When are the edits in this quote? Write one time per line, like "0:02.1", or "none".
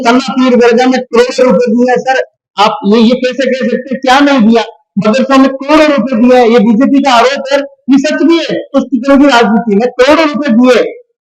none